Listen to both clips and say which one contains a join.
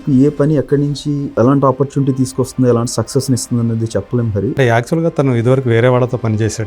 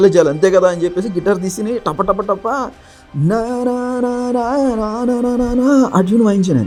first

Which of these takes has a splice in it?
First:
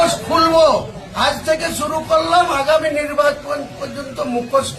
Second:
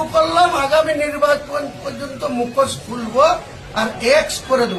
first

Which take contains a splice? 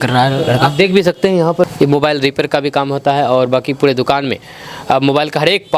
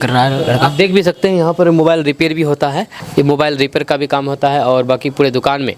first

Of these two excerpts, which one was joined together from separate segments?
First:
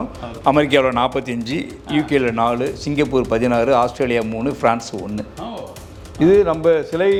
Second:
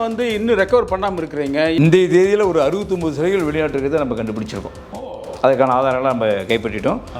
second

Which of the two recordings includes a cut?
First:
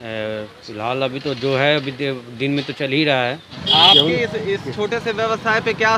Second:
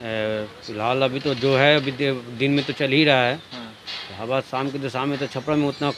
first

